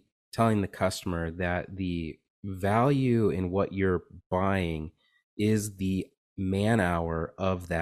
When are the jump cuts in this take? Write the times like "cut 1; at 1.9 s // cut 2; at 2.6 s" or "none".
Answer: none